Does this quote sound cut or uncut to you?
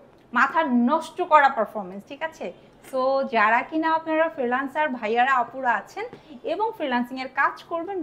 uncut